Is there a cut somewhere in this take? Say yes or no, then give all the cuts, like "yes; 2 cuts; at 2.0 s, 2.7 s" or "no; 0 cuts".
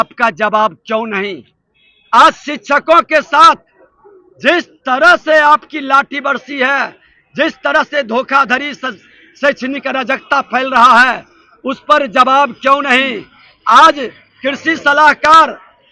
no; 0 cuts